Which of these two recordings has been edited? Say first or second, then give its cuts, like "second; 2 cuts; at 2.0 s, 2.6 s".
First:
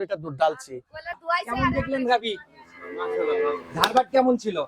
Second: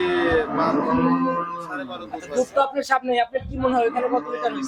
first; 1 cut; at 1.1 s